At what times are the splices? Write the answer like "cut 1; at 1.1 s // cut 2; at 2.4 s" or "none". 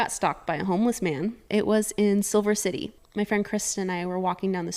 cut 1; at 1.4 s // cut 2; at 3.0 s